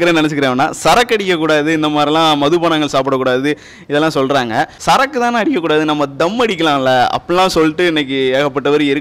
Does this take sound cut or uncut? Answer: cut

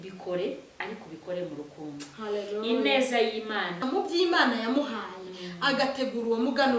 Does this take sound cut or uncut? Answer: cut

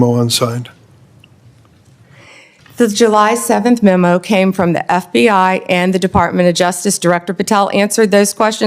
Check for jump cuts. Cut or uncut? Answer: uncut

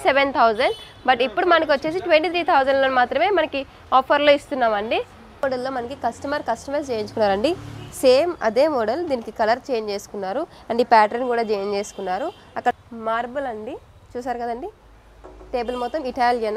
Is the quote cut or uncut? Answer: cut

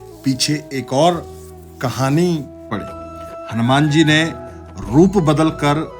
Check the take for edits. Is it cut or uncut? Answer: cut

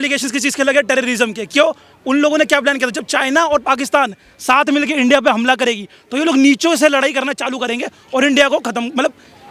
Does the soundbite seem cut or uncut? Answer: uncut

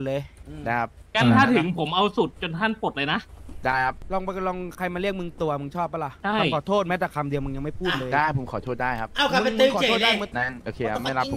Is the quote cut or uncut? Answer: cut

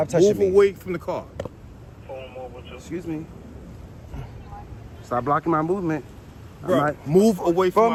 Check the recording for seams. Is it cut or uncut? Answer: uncut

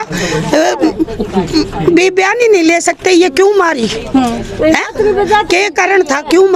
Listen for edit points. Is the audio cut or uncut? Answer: uncut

